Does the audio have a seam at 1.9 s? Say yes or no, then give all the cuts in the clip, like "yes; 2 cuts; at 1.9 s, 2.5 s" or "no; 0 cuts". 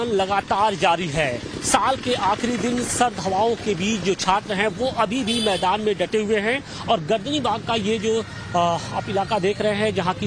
no; 1 cut; at 7.0 s